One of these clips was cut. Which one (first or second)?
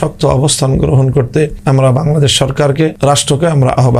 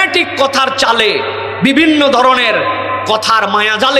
first